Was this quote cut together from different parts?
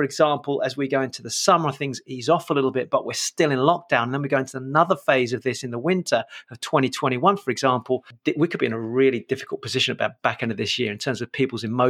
no; 0 cuts

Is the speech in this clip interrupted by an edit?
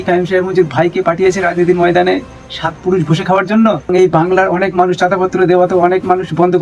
yes; 1 cut; at 3.9 s

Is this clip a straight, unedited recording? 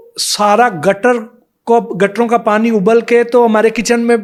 yes; 0 cuts

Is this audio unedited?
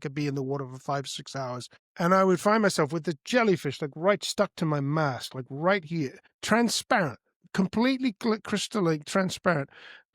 no; 2 cuts; at 1.8 s, 6.3 s

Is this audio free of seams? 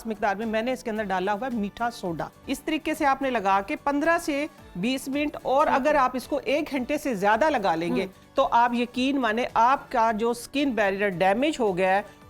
no; 1 cut; at 2.4 s

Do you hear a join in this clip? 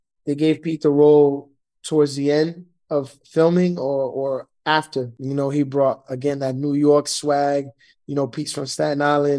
yes; 1 cut; at 5.2 s

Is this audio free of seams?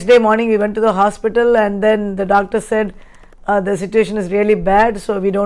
yes; 0 cuts

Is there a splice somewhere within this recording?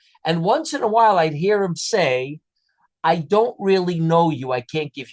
no; 0 cuts

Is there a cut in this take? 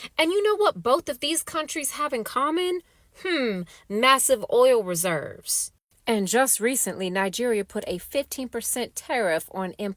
no; 0 cuts

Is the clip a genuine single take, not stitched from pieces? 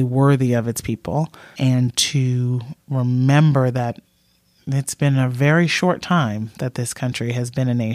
no; 1 cut; at 1.5 s

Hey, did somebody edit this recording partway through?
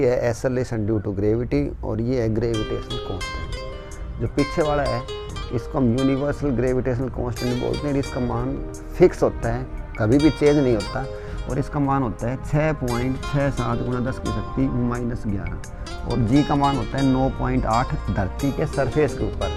no; 0 cuts

